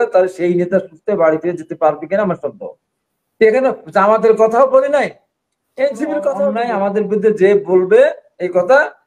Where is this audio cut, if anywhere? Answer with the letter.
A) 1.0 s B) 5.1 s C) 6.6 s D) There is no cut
C